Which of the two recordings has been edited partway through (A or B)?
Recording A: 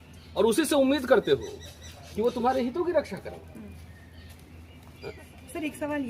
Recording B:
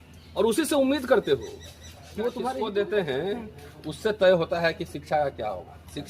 B